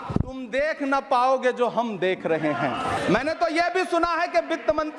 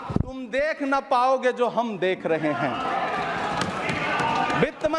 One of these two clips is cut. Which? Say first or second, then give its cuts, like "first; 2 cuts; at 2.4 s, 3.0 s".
first; 1 cut; at 3.0 s